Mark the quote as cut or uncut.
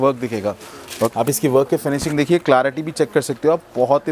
cut